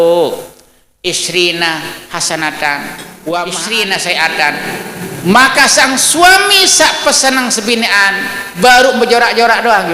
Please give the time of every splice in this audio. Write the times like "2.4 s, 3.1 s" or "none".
3.6 s